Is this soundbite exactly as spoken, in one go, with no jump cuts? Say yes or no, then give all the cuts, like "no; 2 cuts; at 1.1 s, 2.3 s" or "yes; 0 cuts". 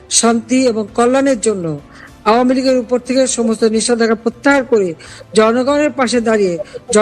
yes; 0 cuts